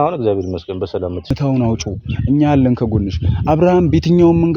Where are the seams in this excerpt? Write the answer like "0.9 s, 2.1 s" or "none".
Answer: 1.4 s